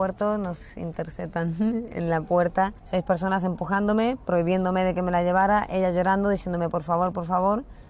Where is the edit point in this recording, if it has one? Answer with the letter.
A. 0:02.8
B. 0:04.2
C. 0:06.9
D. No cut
A